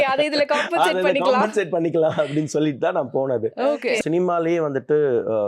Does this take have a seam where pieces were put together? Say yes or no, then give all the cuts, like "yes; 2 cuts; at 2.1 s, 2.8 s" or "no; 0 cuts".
yes; 1 cut; at 4.0 s